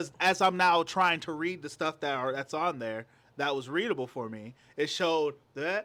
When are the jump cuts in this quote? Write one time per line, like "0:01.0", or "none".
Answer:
none